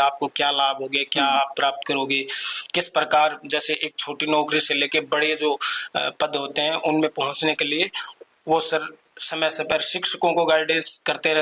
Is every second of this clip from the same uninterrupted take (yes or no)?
yes